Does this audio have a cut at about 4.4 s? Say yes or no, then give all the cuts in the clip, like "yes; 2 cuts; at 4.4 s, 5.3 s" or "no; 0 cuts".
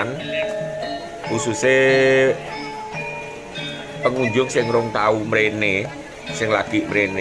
no; 0 cuts